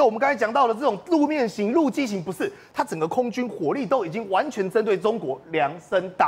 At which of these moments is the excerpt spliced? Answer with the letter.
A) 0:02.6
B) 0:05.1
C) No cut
C